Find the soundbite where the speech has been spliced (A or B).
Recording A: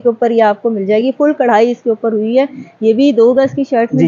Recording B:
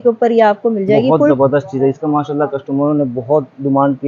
B